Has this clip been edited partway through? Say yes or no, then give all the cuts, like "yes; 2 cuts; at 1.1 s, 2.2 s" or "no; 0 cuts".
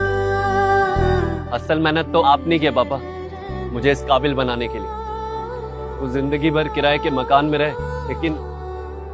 yes; 1 cut; at 1.2 s